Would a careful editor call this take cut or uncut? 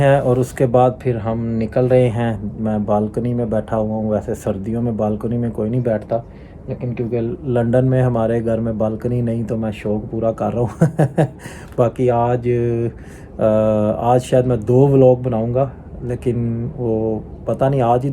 uncut